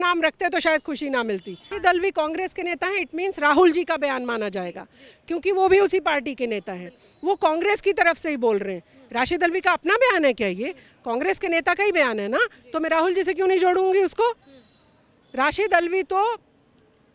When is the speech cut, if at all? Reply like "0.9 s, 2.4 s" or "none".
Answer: none